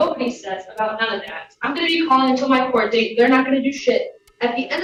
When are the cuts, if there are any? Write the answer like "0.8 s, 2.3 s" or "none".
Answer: none